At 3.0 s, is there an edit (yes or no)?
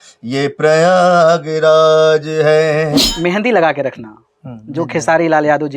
yes